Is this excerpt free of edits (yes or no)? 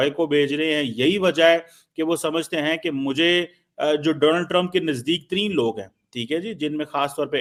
yes